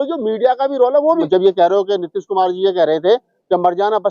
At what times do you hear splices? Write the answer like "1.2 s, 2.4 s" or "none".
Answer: 1.2 s